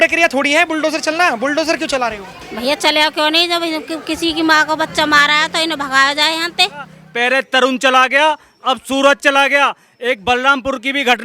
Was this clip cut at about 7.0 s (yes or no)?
yes